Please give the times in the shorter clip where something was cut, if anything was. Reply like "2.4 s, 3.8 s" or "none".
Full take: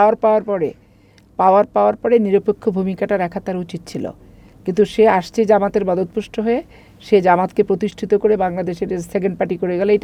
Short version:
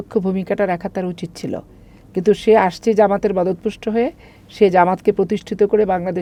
none